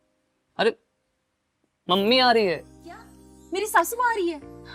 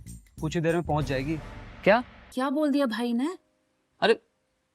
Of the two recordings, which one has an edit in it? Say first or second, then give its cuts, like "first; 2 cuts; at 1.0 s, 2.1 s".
second; 1 cut; at 2.2 s